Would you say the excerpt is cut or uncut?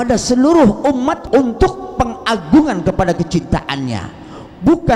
cut